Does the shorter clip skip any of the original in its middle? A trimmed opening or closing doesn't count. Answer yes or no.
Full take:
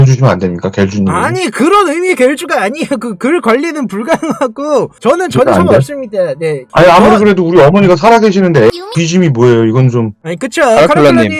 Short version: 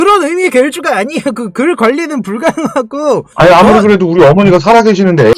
yes